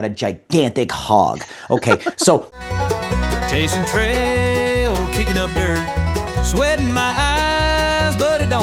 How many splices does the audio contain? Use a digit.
1